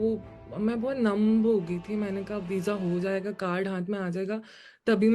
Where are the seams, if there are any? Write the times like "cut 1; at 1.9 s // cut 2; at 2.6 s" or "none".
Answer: none

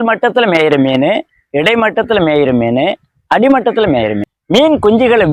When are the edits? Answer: cut 1; at 4.3 s

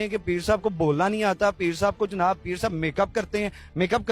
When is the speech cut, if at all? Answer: none

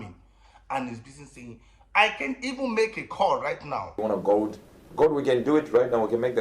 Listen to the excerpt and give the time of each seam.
cut 1; at 4.0 s

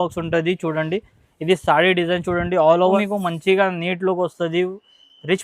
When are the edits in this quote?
cut 1; at 3.0 s

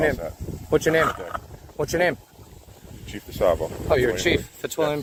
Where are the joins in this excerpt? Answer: none

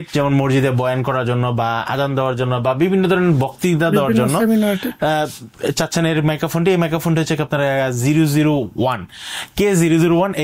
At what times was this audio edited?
none

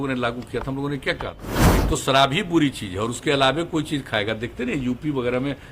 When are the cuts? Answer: cut 1; at 1.8 s

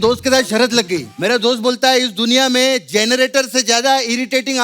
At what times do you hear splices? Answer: cut 1; at 1.1 s

